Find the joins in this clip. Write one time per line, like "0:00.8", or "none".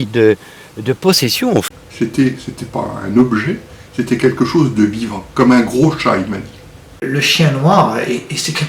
0:01.7
0:07.0